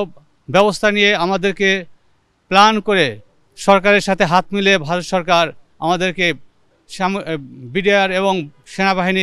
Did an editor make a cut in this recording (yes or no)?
no